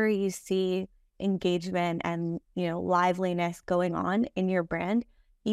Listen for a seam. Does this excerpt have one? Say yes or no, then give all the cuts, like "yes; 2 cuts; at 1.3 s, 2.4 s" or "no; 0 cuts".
no; 0 cuts